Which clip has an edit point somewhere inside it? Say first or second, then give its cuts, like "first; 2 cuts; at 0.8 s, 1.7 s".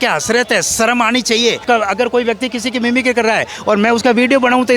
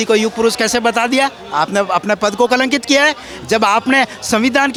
first; 1 cut; at 1.6 s